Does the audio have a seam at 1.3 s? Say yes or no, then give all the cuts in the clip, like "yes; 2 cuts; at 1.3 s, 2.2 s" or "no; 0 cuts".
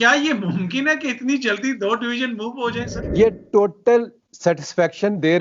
no; 1 cut; at 3.0 s